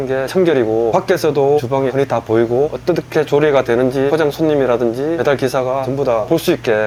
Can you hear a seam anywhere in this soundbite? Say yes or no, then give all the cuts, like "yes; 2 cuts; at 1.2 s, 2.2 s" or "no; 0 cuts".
no; 0 cuts